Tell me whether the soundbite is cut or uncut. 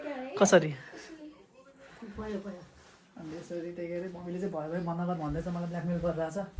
uncut